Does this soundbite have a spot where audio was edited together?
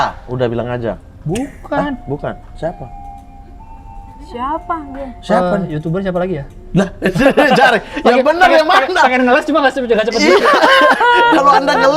no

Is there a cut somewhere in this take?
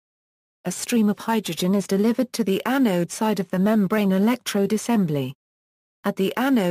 no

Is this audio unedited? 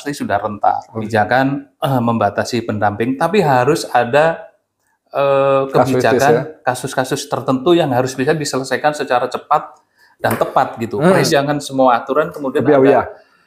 no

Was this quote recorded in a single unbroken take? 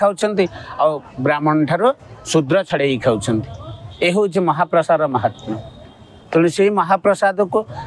yes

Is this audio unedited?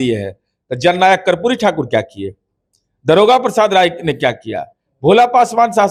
yes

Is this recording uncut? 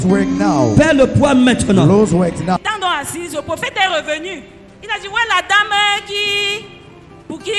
no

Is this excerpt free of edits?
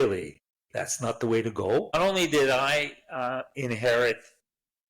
no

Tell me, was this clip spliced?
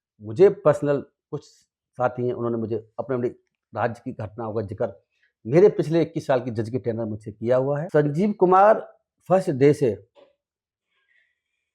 yes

